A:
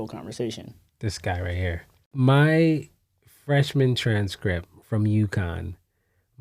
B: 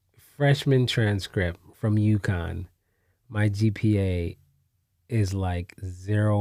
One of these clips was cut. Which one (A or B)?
A